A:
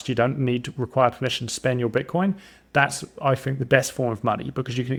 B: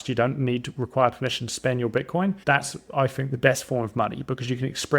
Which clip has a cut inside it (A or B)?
B